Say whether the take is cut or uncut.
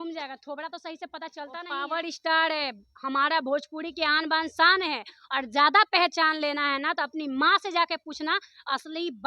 cut